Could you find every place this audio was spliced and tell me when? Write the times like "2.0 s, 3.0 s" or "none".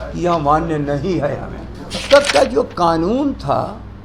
2.0 s